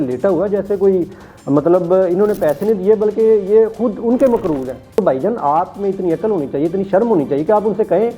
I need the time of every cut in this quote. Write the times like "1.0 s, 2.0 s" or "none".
5.0 s